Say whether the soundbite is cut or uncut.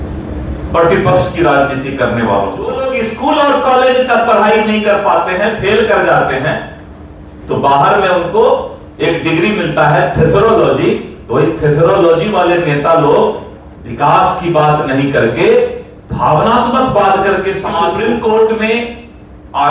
cut